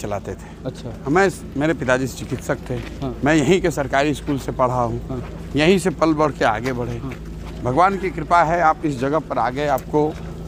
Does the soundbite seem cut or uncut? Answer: uncut